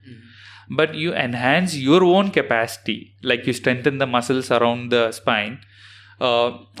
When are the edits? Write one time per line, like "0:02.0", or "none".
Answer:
none